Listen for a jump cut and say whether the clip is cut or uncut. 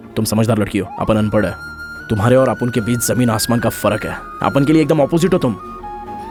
uncut